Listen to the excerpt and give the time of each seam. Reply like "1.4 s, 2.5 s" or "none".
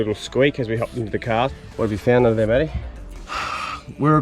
1.5 s, 2.9 s